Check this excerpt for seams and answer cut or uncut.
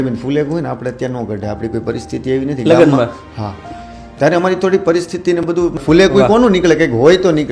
cut